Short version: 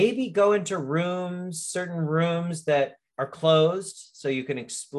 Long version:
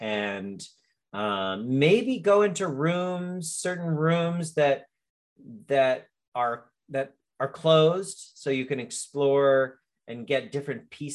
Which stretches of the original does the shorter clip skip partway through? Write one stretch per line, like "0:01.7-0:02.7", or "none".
0:05.0-0:07.3